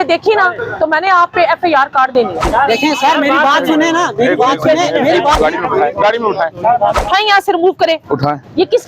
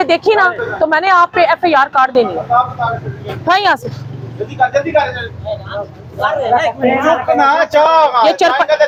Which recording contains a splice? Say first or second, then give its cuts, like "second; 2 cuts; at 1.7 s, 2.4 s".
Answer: first; 3 cuts; at 2.5 s, 5.4 s, 7.0 s